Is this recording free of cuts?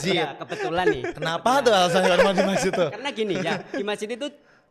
yes; 0 cuts

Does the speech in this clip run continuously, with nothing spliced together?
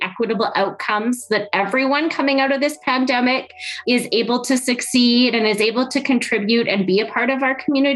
no; 1 cut; at 3.8 s

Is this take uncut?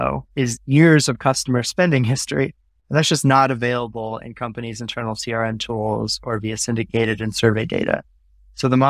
yes; 0 cuts

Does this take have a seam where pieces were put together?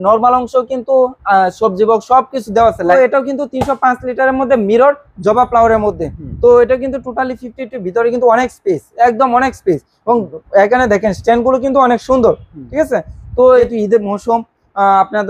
yes; 2 cuts; at 2.9 s, 13.6 s

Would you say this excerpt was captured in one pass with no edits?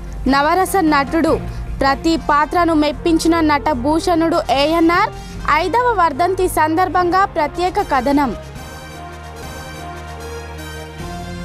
yes; 0 cuts

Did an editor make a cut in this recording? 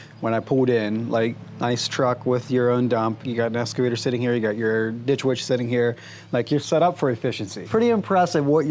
yes; 2 cuts; at 3.2 s, 7.6 s

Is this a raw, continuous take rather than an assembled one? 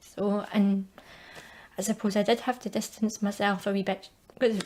yes; 0 cuts

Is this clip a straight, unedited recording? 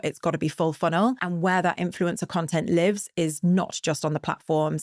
no; 1 cut; at 1.2 s

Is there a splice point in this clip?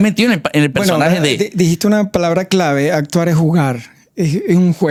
no; 0 cuts

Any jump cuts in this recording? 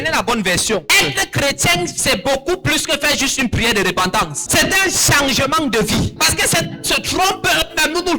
yes; 3 cuts; at 0.9 s, 4.4 s, 6.2 s

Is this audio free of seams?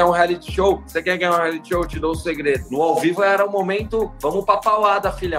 no; 1 cut; at 2.6 s

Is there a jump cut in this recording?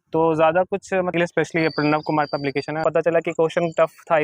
yes; 2 cuts; at 1.1 s, 2.8 s

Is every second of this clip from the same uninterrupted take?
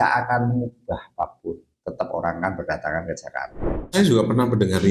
no; 1 cut; at 3.8 s

